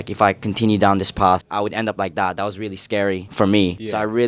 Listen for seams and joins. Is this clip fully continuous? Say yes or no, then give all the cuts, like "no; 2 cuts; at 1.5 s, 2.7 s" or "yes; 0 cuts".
yes; 0 cuts